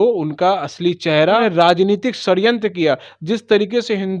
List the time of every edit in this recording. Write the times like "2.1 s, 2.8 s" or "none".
1.4 s